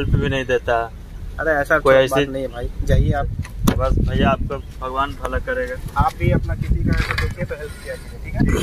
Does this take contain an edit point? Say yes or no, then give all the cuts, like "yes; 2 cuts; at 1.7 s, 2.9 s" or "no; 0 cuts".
no; 0 cuts